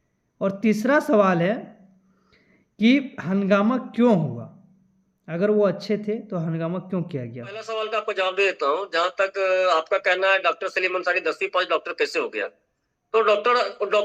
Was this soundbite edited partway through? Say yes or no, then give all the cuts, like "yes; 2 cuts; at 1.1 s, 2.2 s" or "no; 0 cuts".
yes; 1 cut; at 7.7 s